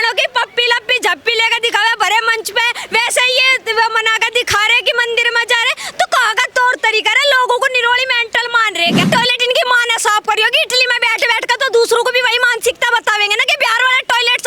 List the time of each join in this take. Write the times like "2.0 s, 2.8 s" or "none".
9.0 s